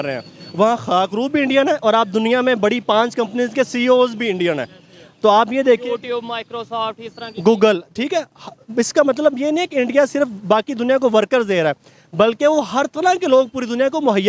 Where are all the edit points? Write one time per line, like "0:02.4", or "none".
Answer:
none